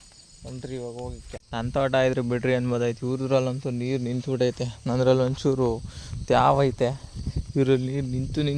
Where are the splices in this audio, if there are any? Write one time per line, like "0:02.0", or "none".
0:01.3

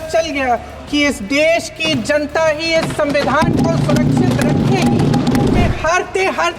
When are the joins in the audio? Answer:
0:05.6

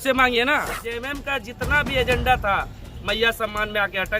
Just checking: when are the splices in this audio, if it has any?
0:01.0

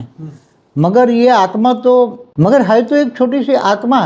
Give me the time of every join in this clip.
0:02.2

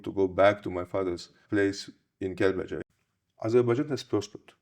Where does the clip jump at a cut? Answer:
0:01.3
0:02.8

